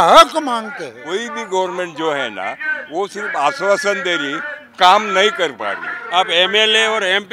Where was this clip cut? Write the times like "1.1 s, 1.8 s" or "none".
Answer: 0.9 s, 6.0 s